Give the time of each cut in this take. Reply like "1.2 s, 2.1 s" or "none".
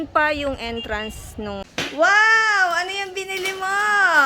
1.6 s

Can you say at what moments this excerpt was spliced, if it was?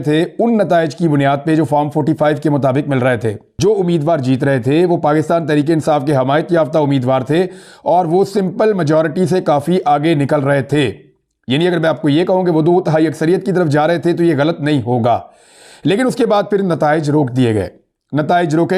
3.5 s

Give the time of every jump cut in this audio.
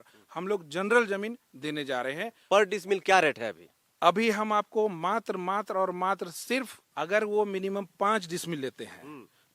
2.4 s, 6.8 s

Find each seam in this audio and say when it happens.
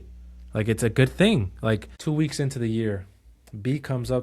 1.9 s

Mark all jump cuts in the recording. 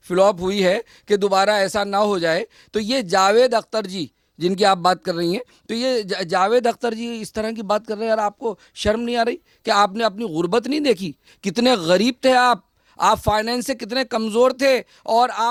none

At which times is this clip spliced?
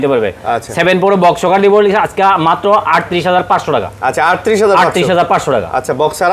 none

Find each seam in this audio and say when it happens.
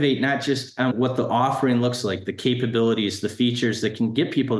0.9 s

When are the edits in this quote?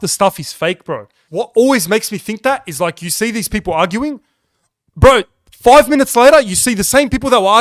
1.2 s

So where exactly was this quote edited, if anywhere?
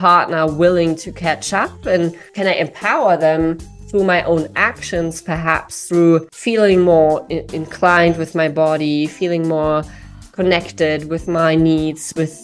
2.2 s, 6.3 s

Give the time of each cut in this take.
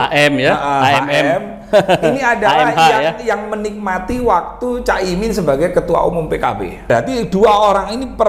6.8 s

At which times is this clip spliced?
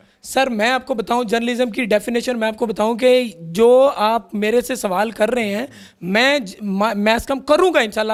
none

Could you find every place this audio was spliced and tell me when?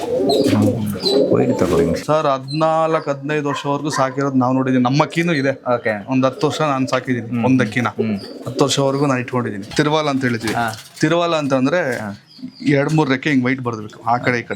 2.0 s, 9.6 s

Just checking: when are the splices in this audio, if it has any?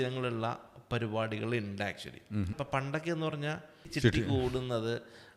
2.5 s, 3.9 s

